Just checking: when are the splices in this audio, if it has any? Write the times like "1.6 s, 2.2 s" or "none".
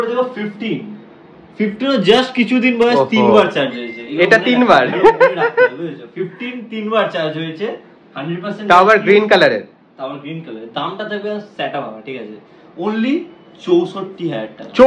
none

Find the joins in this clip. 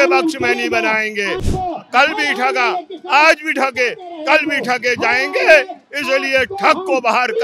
1.4 s

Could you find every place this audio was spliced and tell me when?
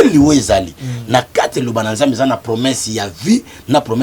none

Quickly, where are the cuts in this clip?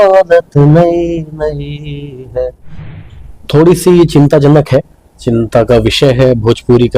2.9 s

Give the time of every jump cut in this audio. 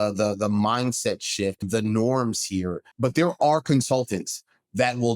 1.6 s, 2.9 s

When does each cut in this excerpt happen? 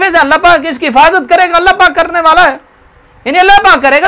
none

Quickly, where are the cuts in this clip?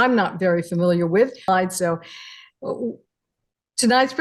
1.5 s

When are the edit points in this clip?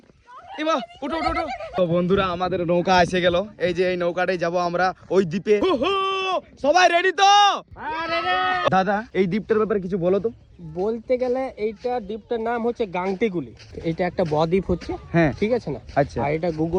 1.8 s, 5.6 s, 8.7 s, 13.7 s

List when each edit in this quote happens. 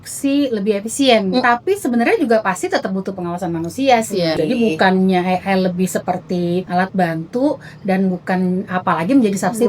1.4 s, 4.3 s, 6.7 s

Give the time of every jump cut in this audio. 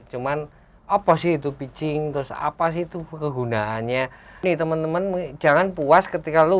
4.3 s

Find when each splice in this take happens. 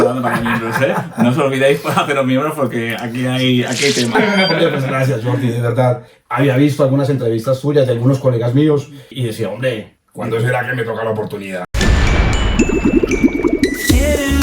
4.1 s, 6.2 s, 9.1 s, 10.0 s, 11.8 s

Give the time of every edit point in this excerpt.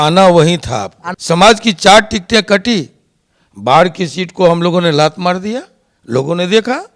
1.1 s

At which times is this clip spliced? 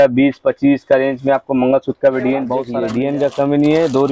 2.7 s

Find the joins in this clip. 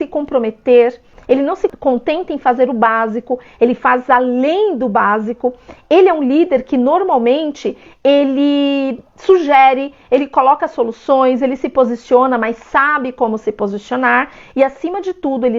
1.5 s

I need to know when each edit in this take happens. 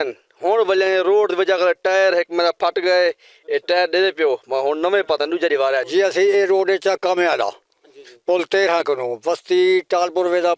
5.9 s

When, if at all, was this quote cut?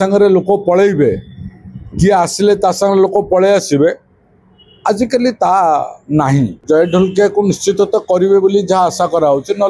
6.6 s

